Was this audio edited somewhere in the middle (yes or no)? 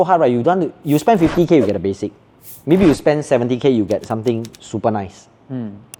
no